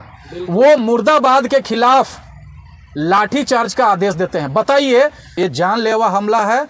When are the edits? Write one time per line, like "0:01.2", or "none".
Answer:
0:05.2